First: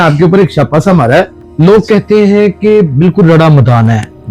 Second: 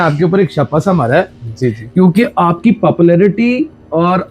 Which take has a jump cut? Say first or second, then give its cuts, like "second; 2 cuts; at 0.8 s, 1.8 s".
first; 1 cut; at 1.4 s